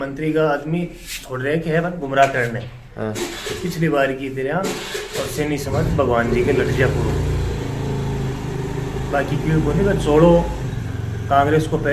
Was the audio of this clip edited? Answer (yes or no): no